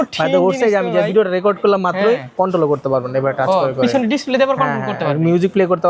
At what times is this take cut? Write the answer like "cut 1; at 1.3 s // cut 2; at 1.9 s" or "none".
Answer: cut 1; at 2.3 s